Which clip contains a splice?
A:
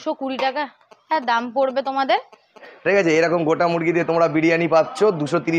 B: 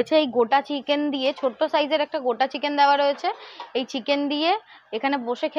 A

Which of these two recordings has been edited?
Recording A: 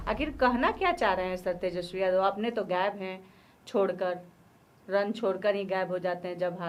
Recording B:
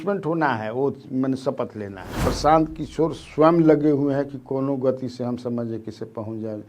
B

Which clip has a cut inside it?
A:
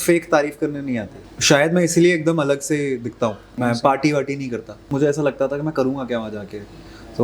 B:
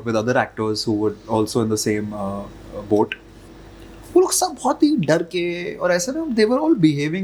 A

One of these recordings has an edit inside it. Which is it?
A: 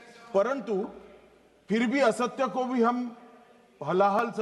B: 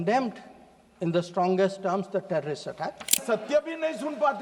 B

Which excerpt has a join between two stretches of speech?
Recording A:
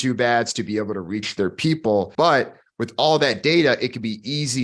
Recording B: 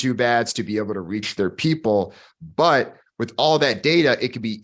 A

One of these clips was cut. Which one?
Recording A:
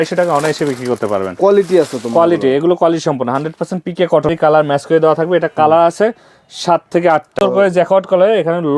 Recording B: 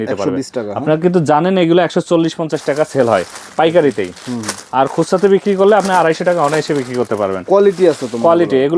A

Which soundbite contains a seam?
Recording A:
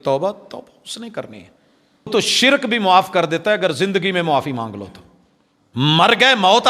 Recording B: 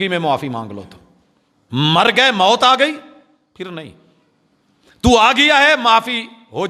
A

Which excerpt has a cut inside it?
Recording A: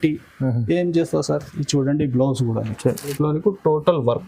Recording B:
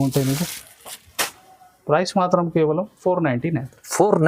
A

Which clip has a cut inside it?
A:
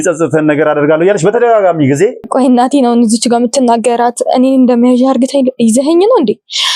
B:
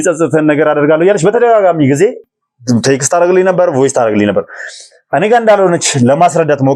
A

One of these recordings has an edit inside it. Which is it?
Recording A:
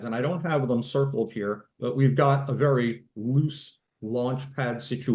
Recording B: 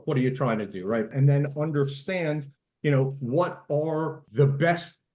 B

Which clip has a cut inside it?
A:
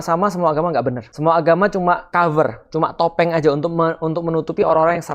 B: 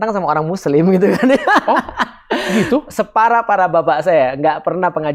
A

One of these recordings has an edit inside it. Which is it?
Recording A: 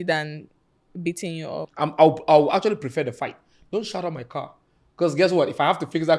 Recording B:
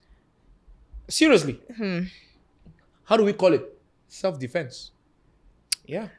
A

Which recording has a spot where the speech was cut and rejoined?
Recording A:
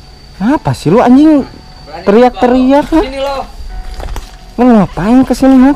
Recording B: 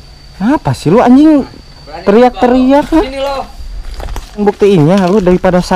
B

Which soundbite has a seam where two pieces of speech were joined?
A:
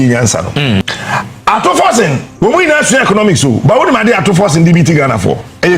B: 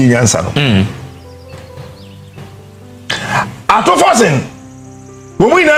A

